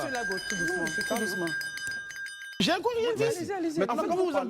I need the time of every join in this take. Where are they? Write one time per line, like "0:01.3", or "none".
0:02.6